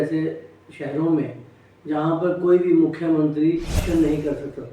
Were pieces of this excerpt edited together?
yes; 1 cut; at 3.8 s

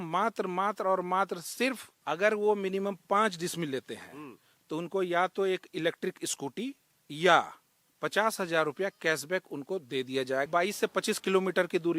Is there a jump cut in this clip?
yes; 2 cuts; at 1.9 s, 10.5 s

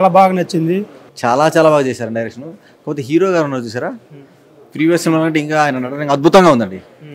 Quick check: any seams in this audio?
yes; 1 cut; at 1.0 s

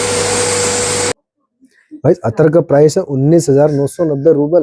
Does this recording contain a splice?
yes; 1 cut; at 1.1 s

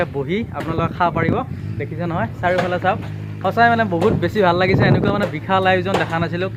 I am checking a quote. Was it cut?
no; 0 cuts

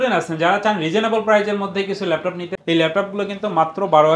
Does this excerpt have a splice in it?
yes; 1 cut; at 2.5 s

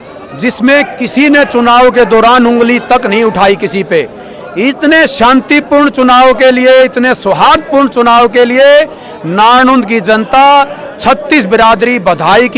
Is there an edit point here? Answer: no; 0 cuts

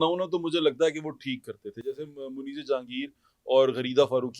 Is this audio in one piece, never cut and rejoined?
yes; 0 cuts

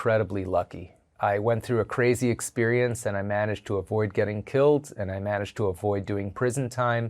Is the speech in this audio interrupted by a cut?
yes; 1 cut; at 1.1 s

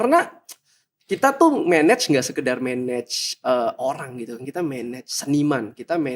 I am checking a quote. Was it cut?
no; 0 cuts

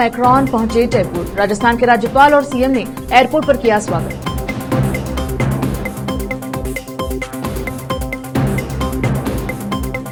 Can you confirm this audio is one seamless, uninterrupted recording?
yes; 0 cuts

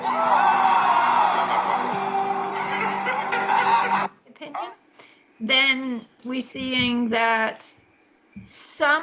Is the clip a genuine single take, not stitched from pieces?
yes; 0 cuts

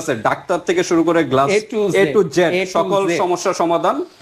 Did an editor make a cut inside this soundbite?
no; 0 cuts

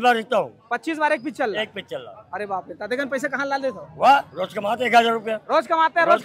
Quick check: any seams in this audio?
no; 0 cuts

